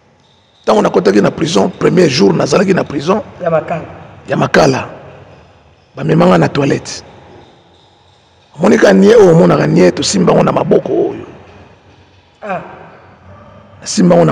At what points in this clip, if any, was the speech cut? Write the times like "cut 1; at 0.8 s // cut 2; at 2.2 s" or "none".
none